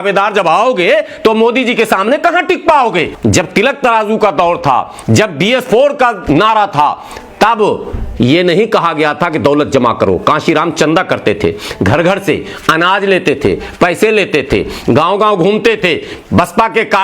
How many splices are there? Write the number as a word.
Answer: one